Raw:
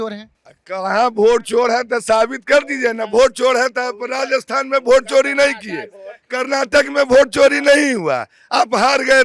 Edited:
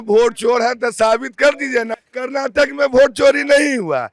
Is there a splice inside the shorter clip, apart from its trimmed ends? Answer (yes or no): yes